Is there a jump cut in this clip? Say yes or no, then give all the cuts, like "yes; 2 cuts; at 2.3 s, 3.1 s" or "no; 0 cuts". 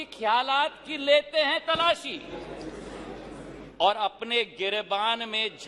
no; 0 cuts